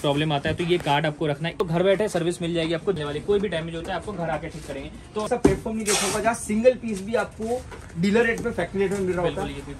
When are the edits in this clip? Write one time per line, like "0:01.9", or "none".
0:01.6
0:03.0
0:05.3